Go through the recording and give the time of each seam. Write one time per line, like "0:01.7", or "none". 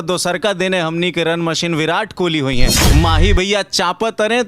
0:02.8